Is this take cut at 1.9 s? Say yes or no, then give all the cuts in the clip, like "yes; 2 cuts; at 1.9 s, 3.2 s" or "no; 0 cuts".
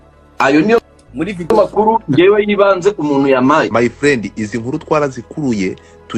no; 1 cut; at 3.7 s